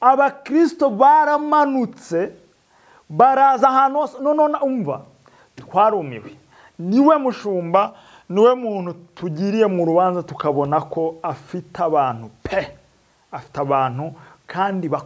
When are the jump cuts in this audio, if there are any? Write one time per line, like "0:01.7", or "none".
none